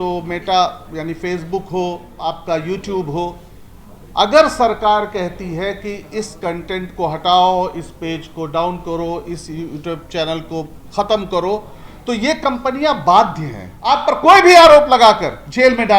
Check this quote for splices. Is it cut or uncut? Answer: cut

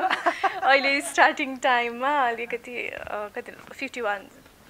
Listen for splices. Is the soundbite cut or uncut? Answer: uncut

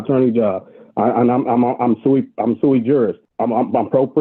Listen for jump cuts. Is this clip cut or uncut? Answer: cut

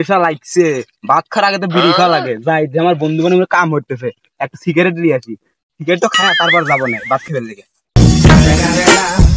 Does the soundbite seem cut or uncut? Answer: uncut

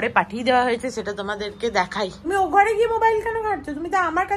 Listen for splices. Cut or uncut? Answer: cut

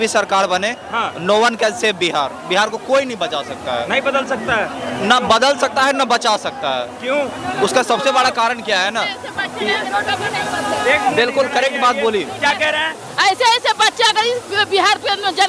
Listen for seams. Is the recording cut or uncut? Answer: uncut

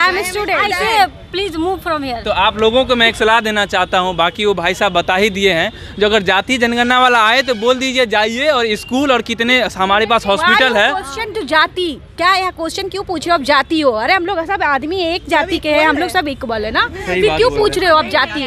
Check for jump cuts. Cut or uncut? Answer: uncut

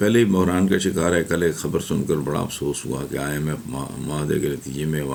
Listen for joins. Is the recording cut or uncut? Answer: uncut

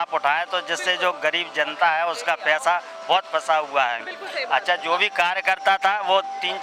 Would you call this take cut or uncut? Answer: uncut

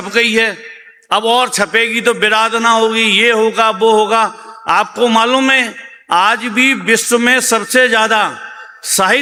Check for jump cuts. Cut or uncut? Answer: uncut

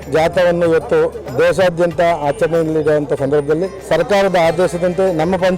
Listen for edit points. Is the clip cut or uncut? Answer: cut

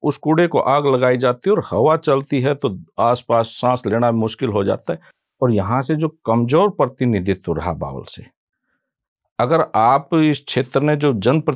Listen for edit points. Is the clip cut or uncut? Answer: cut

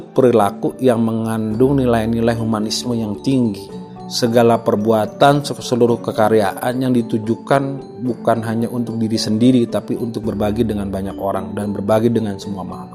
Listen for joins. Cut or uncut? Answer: uncut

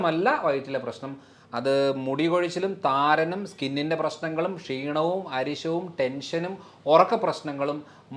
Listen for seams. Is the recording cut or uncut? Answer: uncut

